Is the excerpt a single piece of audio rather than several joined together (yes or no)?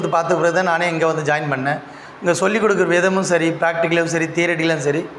yes